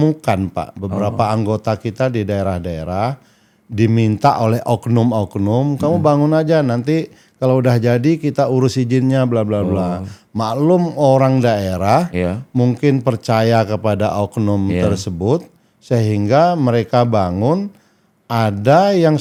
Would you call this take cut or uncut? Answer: uncut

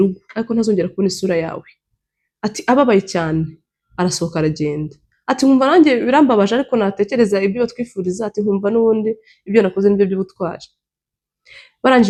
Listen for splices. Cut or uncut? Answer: uncut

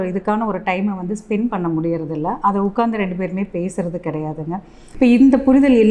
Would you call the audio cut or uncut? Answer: cut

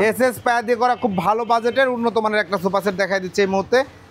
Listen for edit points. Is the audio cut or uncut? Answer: uncut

